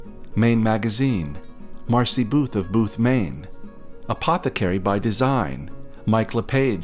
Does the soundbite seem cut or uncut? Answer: uncut